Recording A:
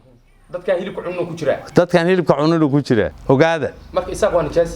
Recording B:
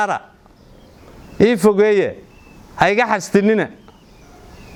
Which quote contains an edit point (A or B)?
A